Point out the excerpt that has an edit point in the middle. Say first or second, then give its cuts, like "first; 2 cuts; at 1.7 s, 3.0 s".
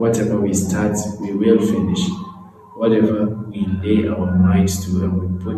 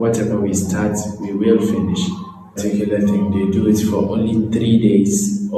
second; 1 cut; at 2.6 s